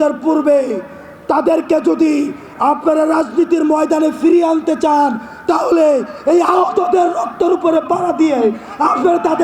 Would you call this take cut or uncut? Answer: uncut